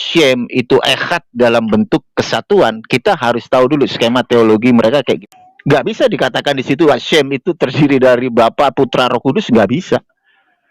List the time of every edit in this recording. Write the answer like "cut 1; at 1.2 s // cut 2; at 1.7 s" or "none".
cut 1; at 5.2 s